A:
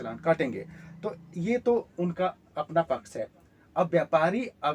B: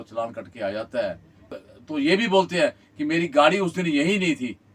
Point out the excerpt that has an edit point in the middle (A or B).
B